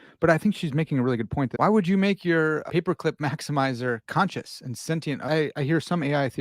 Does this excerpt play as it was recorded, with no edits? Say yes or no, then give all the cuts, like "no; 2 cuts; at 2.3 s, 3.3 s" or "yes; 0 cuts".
no; 4 cuts; at 1.5 s, 2.7 s, 4.0 s, 5.2 s